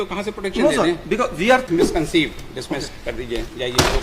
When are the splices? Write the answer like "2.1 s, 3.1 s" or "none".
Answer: 1.7 s